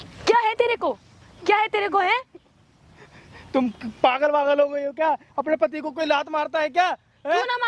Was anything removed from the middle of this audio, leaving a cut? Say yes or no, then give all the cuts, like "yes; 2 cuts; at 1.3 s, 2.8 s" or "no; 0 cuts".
no; 0 cuts